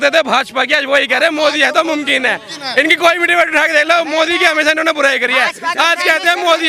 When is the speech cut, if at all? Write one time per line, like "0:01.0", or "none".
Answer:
none